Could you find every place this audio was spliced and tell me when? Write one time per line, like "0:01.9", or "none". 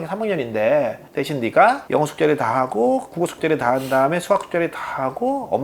0:01.0